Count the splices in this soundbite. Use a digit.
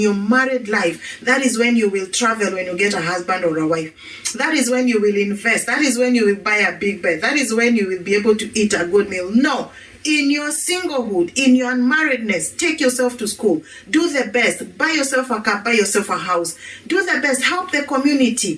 0